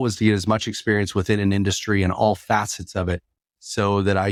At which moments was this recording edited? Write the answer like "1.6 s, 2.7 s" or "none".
none